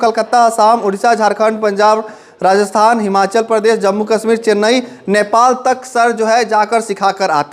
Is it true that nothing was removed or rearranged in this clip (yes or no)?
yes